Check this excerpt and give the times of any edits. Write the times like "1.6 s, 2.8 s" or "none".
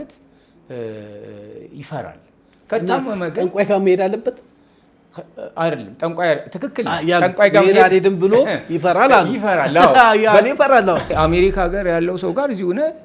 11.1 s